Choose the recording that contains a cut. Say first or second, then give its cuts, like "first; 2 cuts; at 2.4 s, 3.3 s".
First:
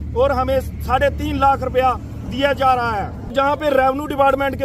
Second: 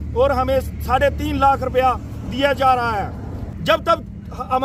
first; 1 cut; at 3.3 s